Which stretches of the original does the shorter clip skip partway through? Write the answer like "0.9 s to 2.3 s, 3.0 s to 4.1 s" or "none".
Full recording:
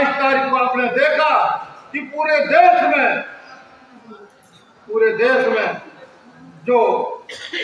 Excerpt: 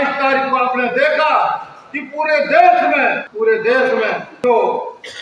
3.2 s to 4.8 s, 5.8 s to 6.5 s

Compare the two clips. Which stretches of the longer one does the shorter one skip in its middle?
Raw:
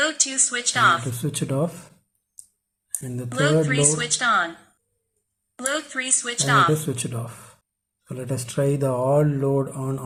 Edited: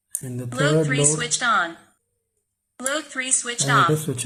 none

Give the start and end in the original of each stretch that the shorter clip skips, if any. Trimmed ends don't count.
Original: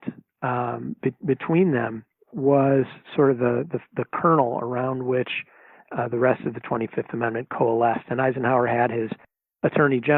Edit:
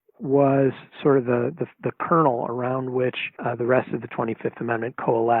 5.4 s to 5.8 s

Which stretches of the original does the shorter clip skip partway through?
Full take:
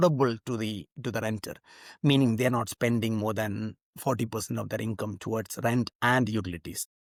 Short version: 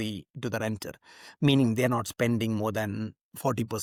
none

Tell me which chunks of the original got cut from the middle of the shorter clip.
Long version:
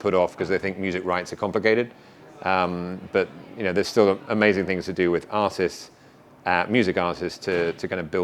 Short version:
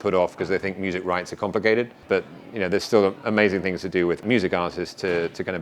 2.0 s to 3.0 s, 5.3 s to 6.7 s

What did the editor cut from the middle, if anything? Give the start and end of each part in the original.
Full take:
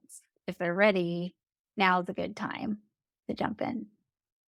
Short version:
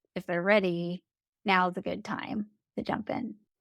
2.9 s to 3.1 s

